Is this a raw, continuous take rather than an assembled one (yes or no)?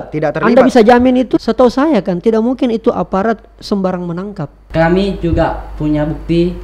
no